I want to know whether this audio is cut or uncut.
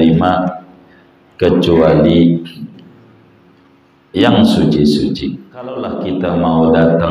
cut